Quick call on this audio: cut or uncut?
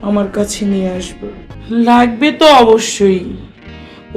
cut